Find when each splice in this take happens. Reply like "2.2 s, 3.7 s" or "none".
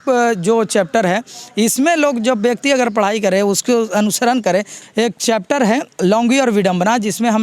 4.8 s